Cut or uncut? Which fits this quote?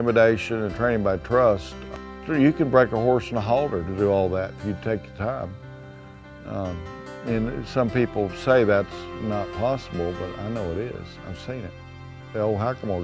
cut